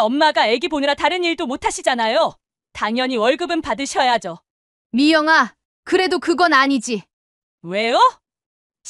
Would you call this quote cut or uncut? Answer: uncut